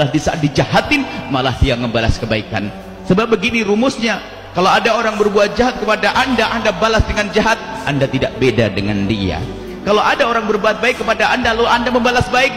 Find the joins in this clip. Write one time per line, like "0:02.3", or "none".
none